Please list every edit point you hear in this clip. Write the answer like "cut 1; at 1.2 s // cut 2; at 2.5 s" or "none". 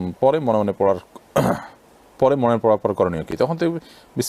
none